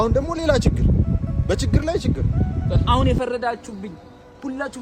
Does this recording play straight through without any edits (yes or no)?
no